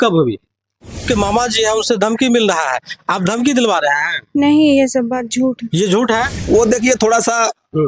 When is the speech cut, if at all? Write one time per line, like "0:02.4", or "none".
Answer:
0:01.0
0:06.3